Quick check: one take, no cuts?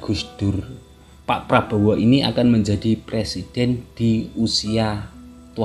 no; 1 cut; at 1.0 s

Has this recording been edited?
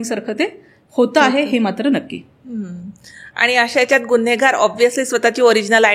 no; 0 cuts

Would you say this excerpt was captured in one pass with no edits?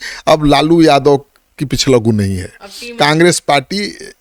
yes; 0 cuts

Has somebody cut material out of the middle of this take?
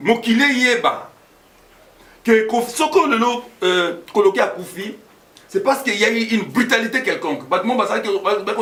no; 0 cuts

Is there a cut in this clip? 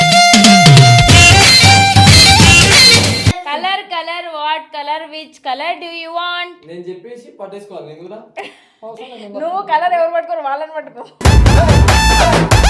yes; 1 cut; at 3.4 s

